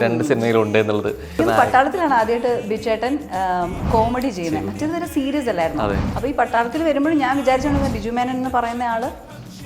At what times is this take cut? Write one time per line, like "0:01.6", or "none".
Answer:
0:01.3